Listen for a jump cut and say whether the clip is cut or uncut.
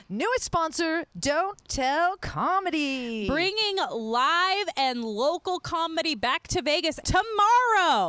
cut